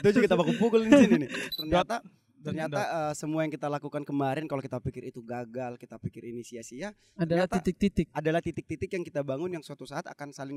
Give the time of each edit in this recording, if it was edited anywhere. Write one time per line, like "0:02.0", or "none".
0:01.4